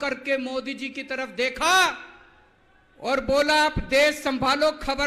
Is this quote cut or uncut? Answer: uncut